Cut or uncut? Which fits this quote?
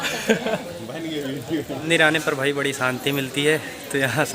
cut